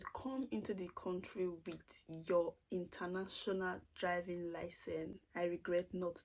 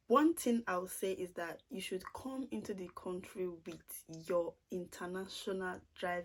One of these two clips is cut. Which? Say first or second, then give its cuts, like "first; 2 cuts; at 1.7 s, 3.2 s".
first; 1 cut; at 5.2 s